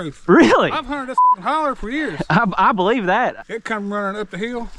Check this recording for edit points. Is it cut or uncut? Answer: cut